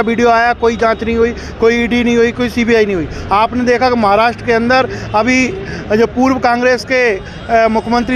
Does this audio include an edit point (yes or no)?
no